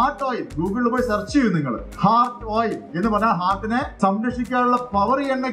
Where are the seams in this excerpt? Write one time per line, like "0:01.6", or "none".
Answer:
0:01.8
0:02.9
0:03.9